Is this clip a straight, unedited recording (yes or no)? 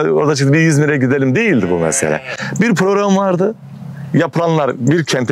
yes